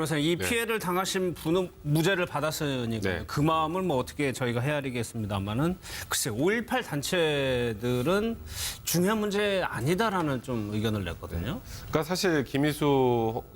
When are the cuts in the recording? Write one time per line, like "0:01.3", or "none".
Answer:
0:10.0